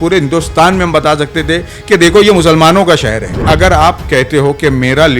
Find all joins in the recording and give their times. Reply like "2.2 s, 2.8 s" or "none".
3.4 s